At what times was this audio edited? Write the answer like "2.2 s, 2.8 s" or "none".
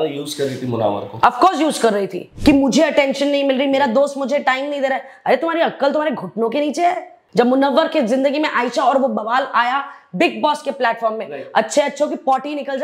2.2 s, 7.2 s